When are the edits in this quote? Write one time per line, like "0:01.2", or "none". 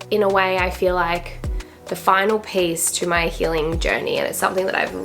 none